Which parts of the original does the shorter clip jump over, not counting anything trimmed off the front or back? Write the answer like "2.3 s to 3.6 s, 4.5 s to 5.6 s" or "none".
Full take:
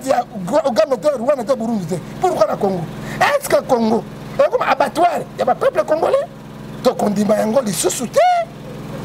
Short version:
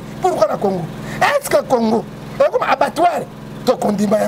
5.3 s to 6.5 s